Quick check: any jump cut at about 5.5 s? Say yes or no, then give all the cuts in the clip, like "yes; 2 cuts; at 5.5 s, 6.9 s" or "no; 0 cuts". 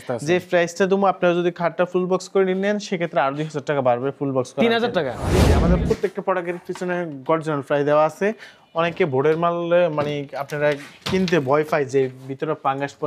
yes; 1 cut; at 5.5 s